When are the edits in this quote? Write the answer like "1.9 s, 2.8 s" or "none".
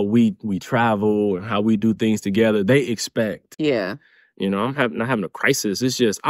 3.4 s